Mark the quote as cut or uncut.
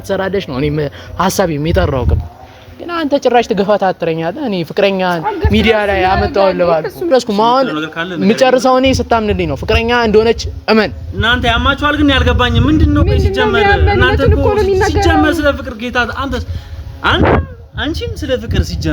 cut